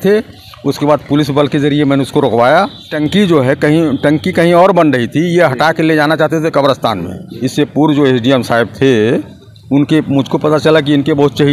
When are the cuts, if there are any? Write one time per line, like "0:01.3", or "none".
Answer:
0:03.0
0:07.3